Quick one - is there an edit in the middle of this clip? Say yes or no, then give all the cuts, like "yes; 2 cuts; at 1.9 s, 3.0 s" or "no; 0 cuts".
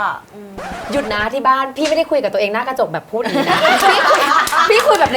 no; 0 cuts